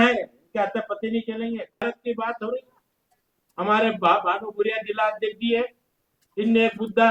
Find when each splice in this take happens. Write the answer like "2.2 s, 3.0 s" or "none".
1.8 s